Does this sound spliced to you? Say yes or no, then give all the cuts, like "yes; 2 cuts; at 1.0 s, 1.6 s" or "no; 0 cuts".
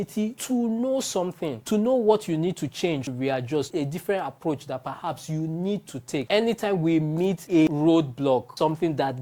yes; 1 cut; at 6.3 s